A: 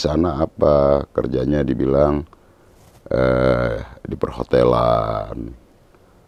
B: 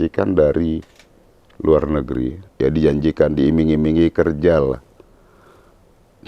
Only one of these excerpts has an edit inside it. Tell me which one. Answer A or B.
B